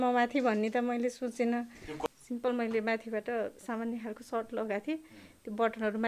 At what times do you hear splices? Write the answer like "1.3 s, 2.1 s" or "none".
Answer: 2.0 s